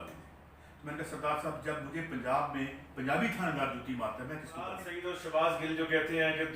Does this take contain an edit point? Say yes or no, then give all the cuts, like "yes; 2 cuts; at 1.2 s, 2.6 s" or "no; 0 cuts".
yes; 1 cut; at 4.9 s